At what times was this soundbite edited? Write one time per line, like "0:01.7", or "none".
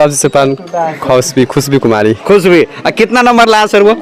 none